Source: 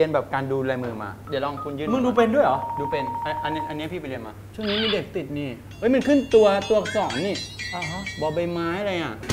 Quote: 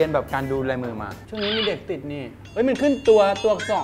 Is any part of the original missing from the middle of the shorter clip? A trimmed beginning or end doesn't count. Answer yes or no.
yes